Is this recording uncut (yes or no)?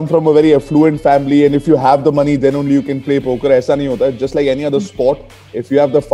yes